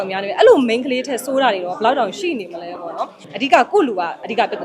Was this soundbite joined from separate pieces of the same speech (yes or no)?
yes